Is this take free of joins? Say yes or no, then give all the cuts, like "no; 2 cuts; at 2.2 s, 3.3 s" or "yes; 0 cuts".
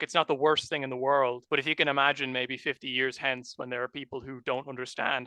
no; 1 cut; at 1.4 s